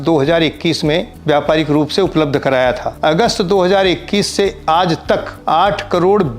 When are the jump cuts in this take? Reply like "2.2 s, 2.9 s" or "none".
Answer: 1.1 s, 2.9 s, 5.3 s